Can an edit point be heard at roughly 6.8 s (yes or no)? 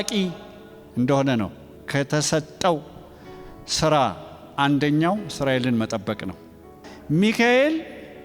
yes